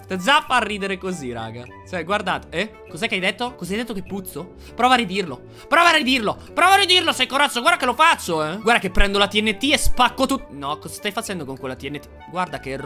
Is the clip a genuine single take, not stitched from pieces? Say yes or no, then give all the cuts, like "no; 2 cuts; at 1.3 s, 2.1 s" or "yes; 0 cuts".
yes; 0 cuts